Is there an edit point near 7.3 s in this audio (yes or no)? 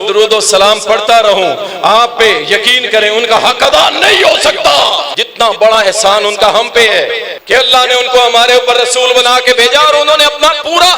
yes